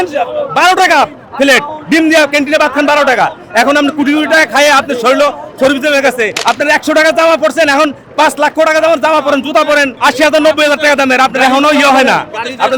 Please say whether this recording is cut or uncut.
cut